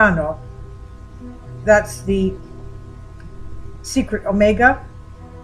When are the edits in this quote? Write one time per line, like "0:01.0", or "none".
0:02.4